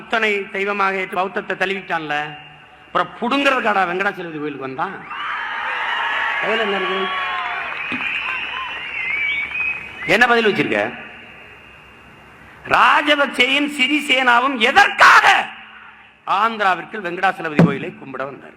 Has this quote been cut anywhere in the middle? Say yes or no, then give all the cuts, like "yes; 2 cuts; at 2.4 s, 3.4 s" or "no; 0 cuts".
yes; 1 cut; at 1.1 s